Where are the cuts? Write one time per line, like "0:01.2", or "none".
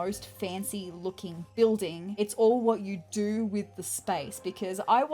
0:02.0

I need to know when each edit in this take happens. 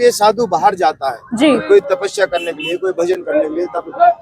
none

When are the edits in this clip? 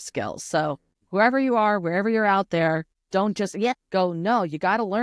0:00.9
0:03.0
0:03.8

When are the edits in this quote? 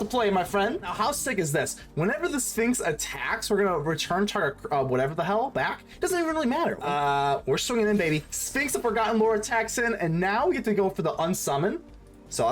0:00.9
0:06.8

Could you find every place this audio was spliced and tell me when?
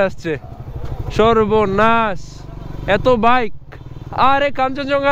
none

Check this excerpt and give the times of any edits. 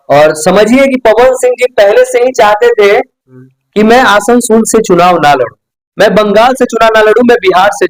none

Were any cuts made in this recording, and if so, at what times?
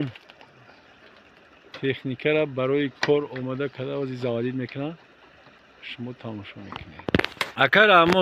0:07.3

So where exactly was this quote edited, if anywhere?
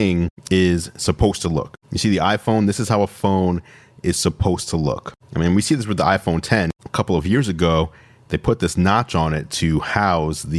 none

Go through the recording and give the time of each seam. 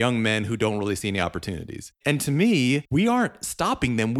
0:02.0
0:02.8

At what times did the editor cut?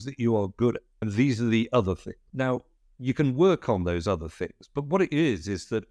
0:00.9
0:02.2

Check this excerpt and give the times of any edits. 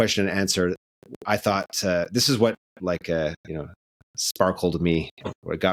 none

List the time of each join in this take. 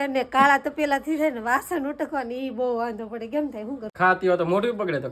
0:03.9

